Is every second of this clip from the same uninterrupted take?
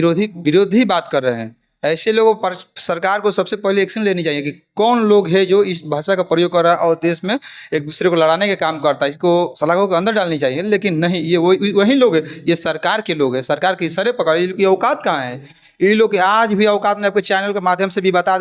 yes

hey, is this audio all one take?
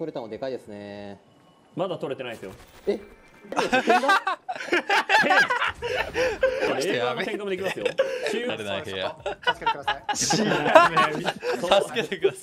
no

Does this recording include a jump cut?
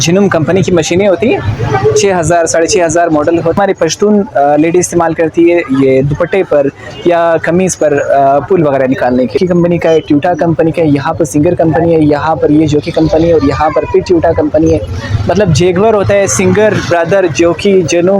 yes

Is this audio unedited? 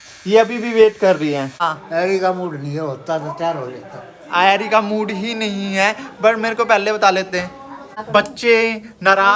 no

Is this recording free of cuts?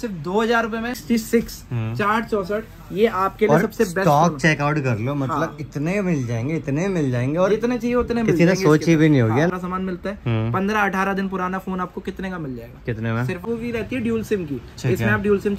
no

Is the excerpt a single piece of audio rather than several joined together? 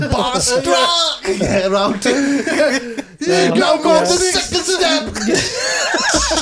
yes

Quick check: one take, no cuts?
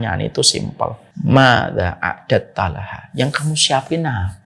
no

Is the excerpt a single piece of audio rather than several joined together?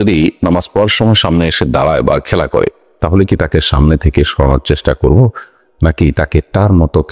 yes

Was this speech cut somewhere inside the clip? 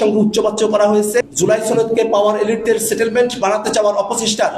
yes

